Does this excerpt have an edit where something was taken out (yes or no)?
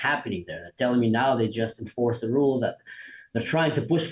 no